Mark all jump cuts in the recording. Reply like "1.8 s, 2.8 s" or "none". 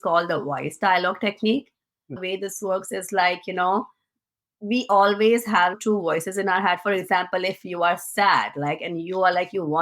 2.2 s